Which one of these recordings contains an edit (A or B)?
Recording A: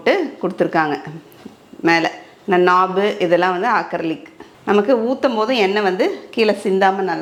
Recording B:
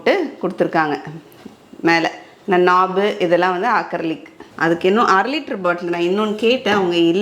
B